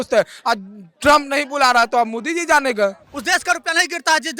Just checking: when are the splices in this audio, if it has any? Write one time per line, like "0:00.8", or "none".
0:03.1